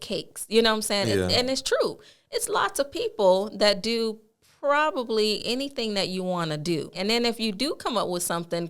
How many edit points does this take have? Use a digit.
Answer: 1